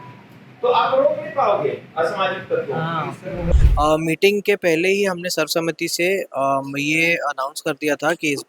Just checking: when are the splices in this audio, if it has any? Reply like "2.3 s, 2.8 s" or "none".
3.5 s